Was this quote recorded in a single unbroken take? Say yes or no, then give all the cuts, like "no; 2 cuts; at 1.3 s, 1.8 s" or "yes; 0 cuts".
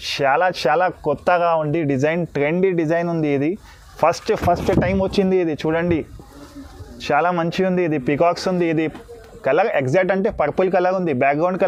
yes; 0 cuts